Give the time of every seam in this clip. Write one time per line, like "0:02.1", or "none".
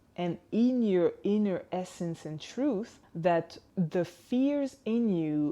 0:03.0
0:03.6